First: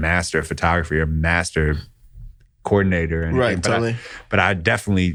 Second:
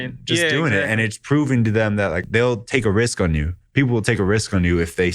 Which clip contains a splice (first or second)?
second